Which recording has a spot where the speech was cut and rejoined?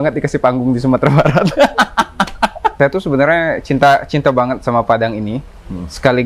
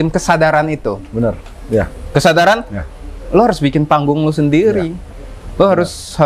first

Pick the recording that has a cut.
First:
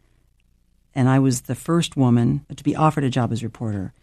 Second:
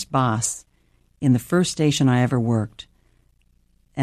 first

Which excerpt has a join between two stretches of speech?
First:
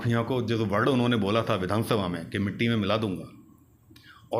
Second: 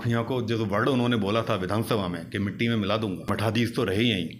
second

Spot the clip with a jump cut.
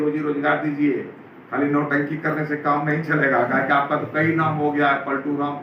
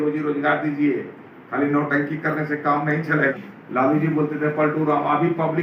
second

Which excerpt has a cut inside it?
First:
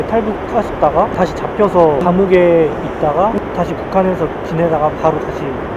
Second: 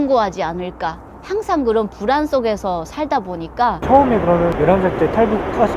second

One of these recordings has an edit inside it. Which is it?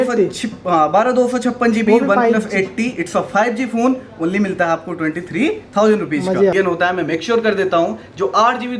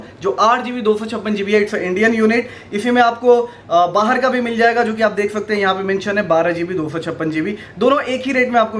first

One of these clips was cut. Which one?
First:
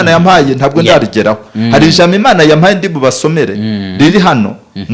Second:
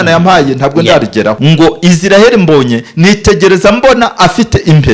second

